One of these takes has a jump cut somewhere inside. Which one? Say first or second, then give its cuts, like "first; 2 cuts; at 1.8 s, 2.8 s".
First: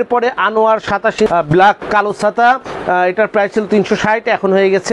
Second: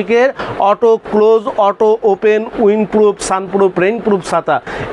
first; 1 cut; at 1.3 s